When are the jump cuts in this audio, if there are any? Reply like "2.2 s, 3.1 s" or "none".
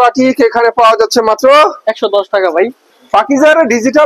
2.9 s